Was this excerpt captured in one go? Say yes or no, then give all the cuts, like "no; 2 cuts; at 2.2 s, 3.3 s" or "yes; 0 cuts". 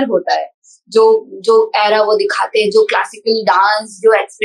yes; 0 cuts